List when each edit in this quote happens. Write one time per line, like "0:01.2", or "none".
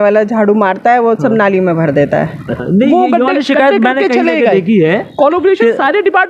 0:02.6